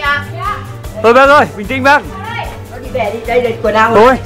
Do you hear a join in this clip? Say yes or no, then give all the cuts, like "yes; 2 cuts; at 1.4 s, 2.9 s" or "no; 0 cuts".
no; 0 cuts